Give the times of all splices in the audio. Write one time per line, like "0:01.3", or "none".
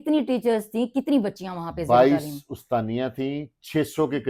none